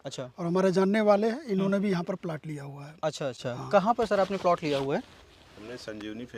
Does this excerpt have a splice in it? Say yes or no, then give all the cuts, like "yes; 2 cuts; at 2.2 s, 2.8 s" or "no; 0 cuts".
no; 0 cuts